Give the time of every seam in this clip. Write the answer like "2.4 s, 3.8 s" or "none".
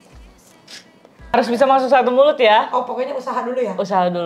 1.3 s